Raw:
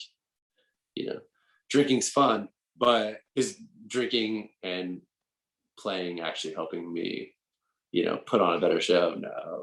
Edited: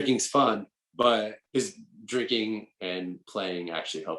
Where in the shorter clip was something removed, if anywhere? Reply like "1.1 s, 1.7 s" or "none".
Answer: 3.2 s